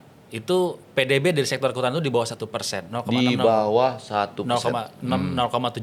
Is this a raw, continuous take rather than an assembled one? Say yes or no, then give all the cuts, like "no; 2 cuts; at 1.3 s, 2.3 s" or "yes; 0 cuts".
yes; 0 cuts